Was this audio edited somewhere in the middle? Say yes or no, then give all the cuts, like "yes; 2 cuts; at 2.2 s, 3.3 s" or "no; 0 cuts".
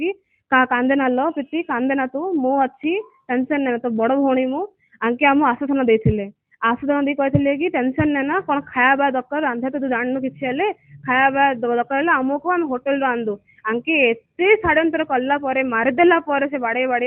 no; 0 cuts